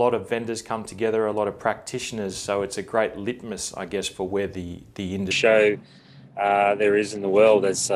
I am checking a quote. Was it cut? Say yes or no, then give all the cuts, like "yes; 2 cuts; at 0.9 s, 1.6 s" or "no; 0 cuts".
no; 0 cuts